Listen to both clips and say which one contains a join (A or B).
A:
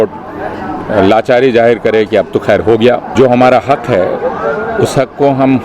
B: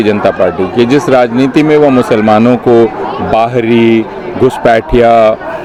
A